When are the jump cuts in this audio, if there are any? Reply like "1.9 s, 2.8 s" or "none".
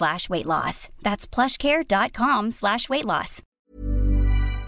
3.6 s